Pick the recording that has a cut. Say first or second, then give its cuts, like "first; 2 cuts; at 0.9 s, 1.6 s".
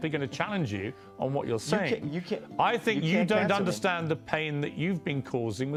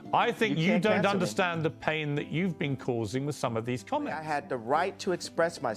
second; 1 cut; at 4.2 s